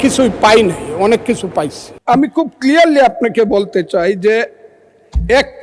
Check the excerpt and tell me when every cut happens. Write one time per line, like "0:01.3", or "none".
0:01.9